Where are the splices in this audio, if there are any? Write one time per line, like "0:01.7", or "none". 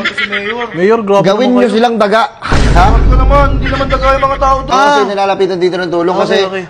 0:04.7